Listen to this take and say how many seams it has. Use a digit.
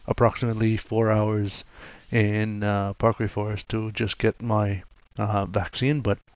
0